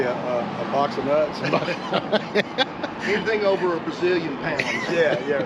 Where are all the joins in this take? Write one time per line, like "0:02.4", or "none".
none